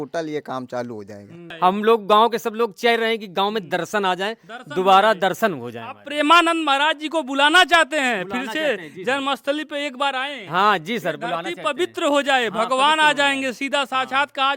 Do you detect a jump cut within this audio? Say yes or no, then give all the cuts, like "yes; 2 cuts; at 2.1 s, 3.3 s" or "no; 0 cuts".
yes; 1 cut; at 1.4 s